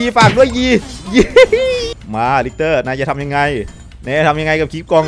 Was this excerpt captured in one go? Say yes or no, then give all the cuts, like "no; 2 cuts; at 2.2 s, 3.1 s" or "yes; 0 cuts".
no; 1 cut; at 2.0 s